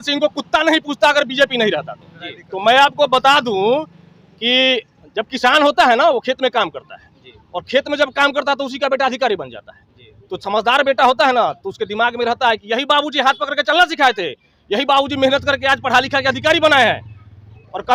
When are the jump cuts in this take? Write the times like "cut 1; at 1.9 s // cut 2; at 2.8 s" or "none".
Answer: none